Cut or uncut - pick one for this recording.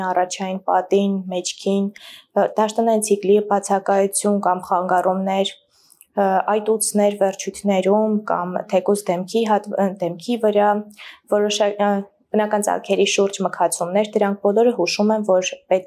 uncut